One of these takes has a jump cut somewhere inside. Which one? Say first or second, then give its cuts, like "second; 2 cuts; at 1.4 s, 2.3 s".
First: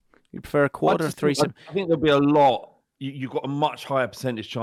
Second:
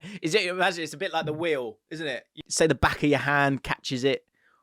second; 1 cut; at 2.3 s